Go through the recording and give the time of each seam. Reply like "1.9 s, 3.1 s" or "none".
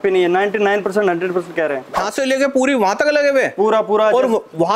2.0 s